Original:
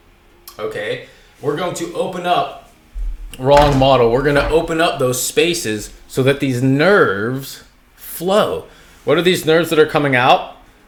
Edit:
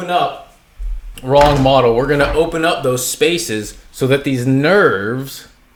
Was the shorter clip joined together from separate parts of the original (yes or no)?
no